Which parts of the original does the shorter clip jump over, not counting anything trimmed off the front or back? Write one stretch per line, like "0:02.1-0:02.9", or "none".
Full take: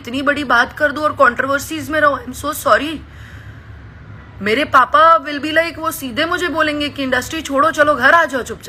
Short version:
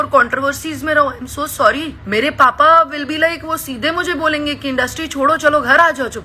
0:03.0-0:04.3

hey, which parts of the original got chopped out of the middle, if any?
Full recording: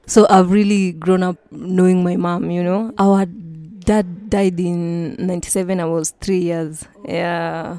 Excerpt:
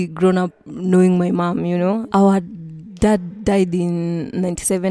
none

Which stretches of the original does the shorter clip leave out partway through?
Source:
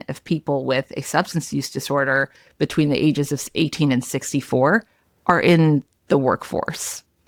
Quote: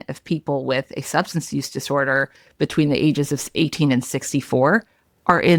none

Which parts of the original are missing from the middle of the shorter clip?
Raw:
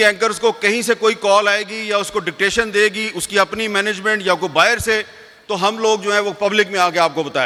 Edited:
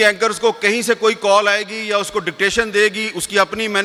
none

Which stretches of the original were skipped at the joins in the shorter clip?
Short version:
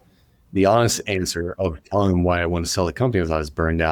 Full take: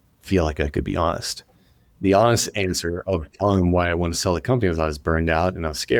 none

